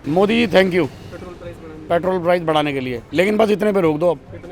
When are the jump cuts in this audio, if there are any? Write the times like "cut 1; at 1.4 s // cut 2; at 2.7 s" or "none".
none